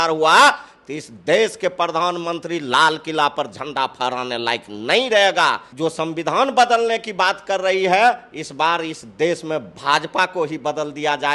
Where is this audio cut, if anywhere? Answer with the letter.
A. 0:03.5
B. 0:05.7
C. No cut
B